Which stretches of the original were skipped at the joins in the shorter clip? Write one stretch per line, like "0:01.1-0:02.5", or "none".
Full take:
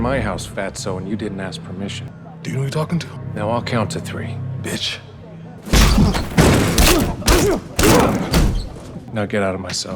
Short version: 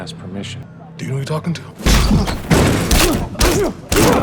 0:03.1-0:05.6